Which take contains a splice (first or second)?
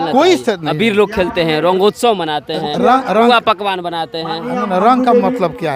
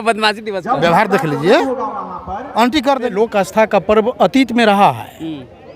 second